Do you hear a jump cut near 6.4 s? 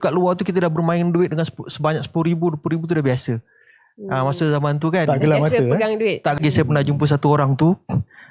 yes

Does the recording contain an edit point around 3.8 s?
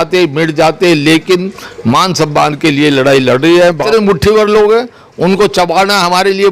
yes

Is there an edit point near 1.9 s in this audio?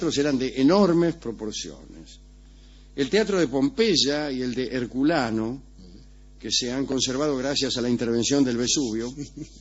yes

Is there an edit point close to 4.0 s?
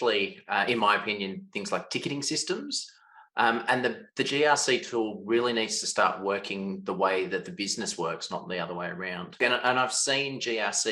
no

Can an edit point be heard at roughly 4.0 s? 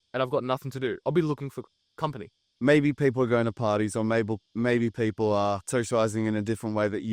no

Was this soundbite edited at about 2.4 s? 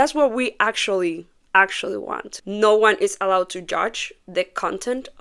yes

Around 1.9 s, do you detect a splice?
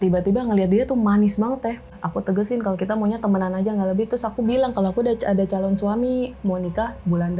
yes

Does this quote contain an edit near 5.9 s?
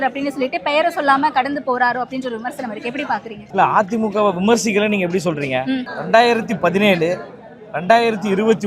yes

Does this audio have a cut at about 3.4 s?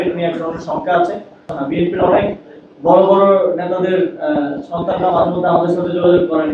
no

